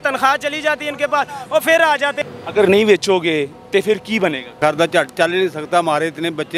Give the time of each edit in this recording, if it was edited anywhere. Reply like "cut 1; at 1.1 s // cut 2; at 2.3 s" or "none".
cut 1; at 2.2 s // cut 2; at 4.5 s